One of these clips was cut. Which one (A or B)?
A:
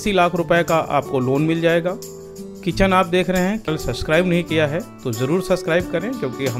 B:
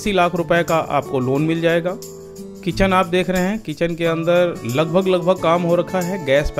A